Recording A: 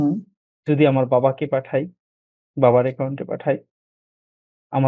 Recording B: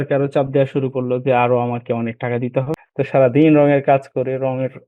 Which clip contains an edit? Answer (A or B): B